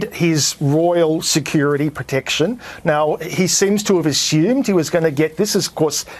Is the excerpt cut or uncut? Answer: uncut